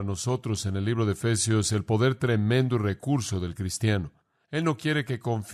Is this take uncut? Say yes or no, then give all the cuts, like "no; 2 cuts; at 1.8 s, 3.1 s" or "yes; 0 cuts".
yes; 0 cuts